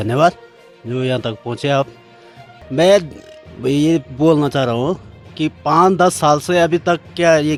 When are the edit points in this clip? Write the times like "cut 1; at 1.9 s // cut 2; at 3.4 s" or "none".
none